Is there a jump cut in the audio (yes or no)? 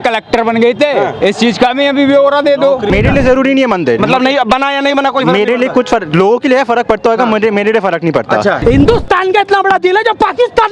yes